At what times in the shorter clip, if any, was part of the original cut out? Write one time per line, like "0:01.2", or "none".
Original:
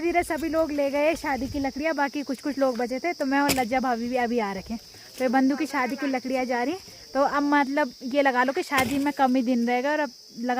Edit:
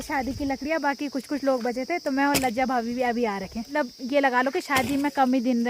0:03.7